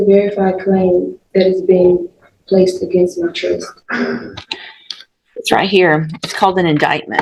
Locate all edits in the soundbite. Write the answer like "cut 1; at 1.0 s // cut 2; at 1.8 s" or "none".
none